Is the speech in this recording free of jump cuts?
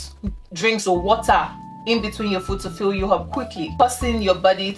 no; 1 cut; at 3.8 s

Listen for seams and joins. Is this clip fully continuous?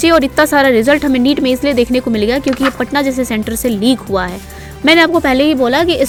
yes; 0 cuts

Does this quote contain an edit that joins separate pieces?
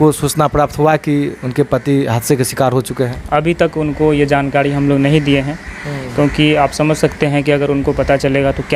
no; 0 cuts

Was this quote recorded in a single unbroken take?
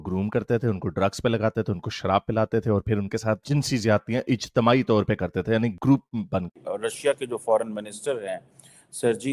no; 1 cut; at 6.7 s

